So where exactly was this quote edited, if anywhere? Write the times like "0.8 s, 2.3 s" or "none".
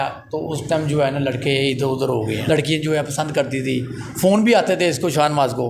2.4 s

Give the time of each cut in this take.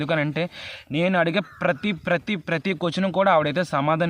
none

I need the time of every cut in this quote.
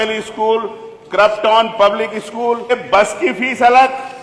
2.7 s

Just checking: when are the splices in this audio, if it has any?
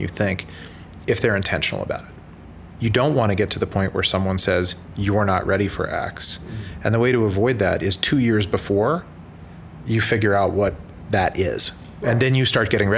2.6 s, 10.9 s

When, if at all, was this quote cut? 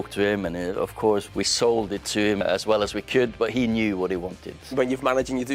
1.2 s, 2.4 s, 4.7 s

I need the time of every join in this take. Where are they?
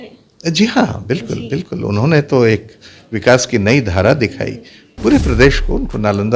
none

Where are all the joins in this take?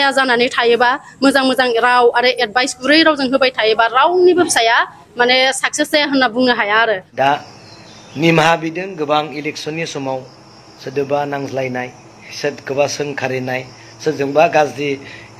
7.1 s

